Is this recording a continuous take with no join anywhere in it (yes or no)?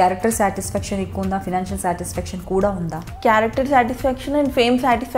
no